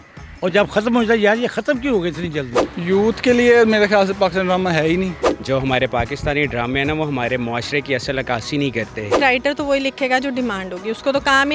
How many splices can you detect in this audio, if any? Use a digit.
3